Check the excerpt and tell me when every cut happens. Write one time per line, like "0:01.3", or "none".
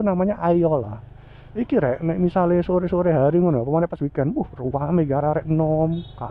none